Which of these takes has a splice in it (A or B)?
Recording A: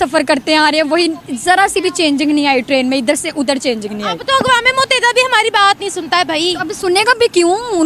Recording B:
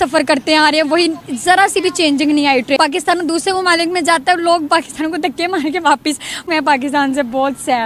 B